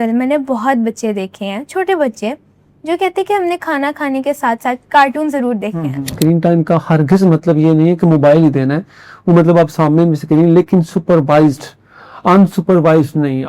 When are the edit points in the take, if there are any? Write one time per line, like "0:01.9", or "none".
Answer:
0:06.1